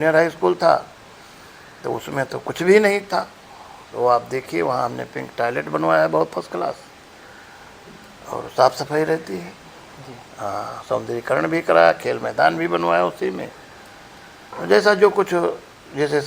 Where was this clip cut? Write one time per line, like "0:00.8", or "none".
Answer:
none